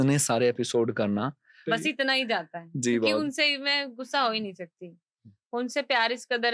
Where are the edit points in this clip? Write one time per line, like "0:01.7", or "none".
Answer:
0:01.6